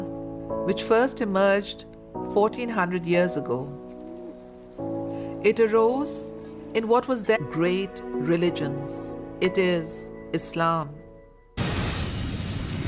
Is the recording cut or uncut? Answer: uncut